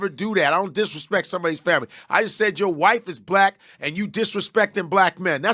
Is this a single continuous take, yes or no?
yes